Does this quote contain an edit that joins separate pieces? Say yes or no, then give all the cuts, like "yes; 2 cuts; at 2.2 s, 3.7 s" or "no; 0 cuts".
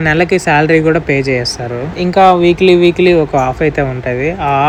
no; 0 cuts